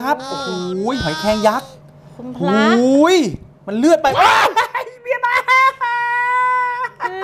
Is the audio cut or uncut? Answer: uncut